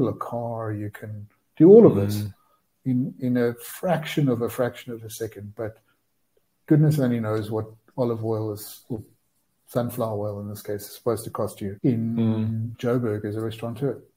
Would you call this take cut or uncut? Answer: cut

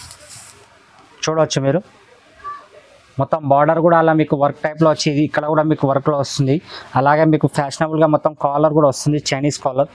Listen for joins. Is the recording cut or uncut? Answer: uncut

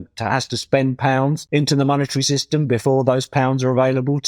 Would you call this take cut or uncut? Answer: cut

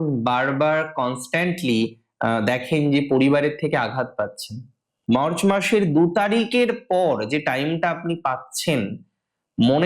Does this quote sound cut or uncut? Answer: cut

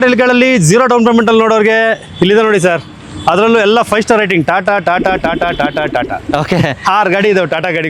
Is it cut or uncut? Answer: uncut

